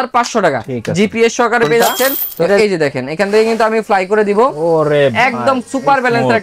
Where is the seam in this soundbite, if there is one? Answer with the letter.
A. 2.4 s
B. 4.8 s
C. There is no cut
A